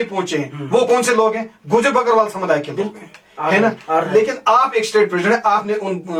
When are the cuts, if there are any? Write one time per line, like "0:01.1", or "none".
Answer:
none